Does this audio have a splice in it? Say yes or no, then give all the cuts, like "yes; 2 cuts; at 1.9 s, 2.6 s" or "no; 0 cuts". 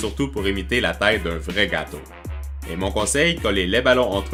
no; 0 cuts